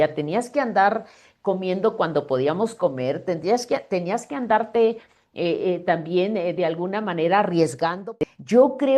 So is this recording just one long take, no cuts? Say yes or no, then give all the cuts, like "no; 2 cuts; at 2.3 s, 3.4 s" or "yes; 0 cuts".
no; 1 cut; at 8.0 s